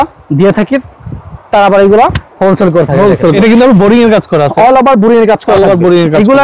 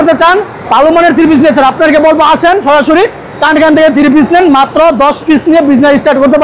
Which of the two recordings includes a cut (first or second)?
first